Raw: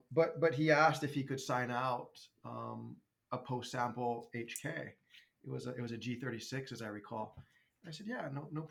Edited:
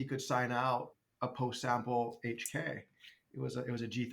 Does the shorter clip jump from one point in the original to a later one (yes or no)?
yes